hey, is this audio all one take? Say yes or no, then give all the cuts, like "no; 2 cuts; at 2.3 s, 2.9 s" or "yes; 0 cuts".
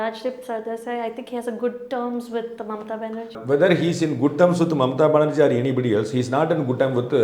no; 1 cut; at 3.4 s